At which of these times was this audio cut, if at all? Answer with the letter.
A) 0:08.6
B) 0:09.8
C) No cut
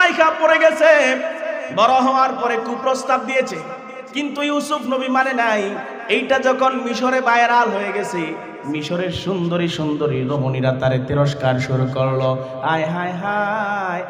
C